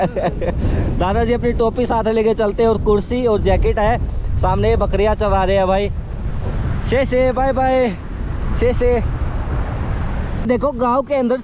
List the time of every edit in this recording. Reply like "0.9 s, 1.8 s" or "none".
none